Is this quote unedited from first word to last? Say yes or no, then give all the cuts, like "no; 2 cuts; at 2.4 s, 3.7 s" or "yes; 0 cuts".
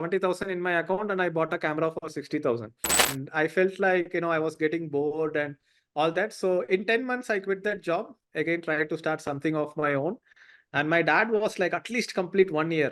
no; 1 cut; at 3.1 s